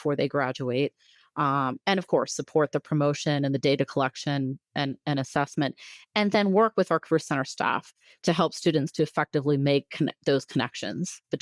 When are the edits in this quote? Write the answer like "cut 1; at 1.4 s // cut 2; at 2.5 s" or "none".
none